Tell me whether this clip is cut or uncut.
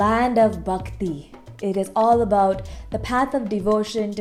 uncut